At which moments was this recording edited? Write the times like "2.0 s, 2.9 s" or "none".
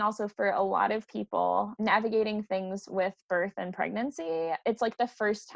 1.7 s, 4.6 s